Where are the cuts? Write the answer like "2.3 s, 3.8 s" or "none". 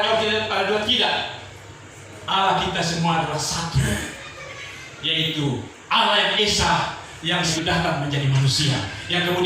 7.5 s